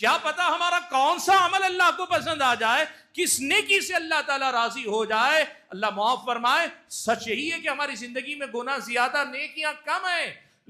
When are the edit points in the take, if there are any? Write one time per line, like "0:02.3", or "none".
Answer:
none